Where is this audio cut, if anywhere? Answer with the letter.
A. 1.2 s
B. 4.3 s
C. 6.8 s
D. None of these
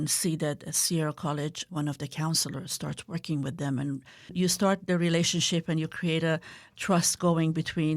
B